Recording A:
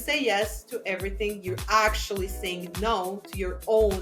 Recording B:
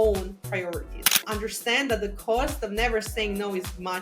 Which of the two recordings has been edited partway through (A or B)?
B